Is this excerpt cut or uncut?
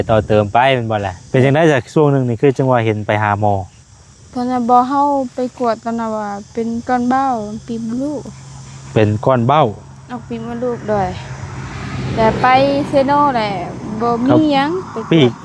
cut